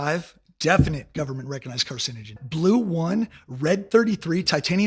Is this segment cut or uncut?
cut